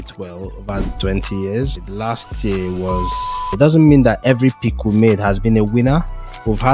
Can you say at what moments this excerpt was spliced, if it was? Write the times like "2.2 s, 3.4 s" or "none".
1.8 s, 3.5 s